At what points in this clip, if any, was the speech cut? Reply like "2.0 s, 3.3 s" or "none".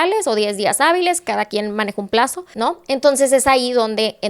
2.4 s